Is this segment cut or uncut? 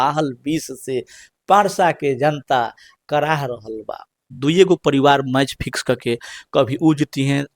cut